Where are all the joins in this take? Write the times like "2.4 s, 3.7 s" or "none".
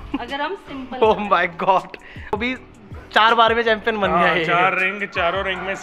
2.3 s